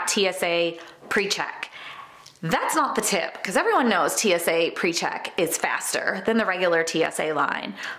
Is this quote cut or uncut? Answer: uncut